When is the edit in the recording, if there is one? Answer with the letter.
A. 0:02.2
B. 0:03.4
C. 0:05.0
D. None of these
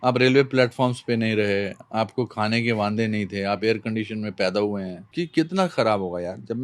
C